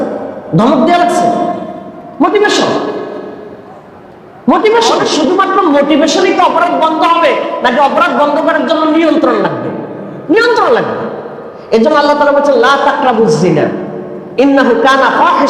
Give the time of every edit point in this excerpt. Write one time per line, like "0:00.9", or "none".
0:05.1